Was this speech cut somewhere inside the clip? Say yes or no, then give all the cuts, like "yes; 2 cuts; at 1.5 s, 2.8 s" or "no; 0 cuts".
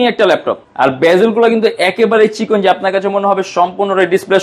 no; 0 cuts